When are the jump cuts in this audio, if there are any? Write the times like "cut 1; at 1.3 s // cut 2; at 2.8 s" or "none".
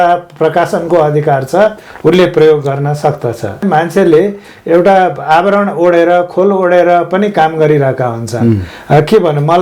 cut 1; at 3.6 s